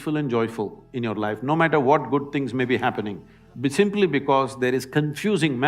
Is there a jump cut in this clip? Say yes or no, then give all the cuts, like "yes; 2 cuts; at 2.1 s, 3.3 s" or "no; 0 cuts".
no; 0 cuts